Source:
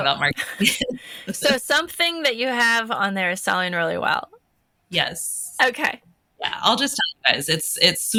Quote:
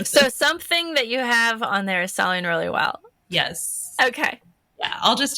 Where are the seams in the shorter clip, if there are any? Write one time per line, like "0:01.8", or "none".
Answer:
0:03.1